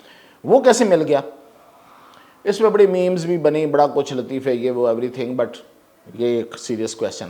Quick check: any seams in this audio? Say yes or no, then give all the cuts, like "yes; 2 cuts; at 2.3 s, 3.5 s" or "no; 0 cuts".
no; 0 cuts